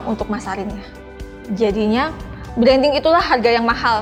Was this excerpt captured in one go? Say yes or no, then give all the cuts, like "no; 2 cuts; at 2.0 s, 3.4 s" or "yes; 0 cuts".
yes; 0 cuts